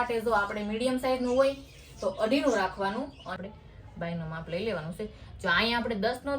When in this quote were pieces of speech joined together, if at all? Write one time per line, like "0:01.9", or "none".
0:03.3